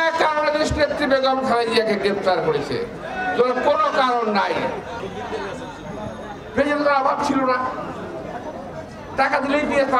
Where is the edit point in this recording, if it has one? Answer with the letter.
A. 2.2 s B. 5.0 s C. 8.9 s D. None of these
B